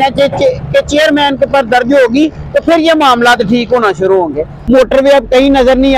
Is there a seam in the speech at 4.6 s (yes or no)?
yes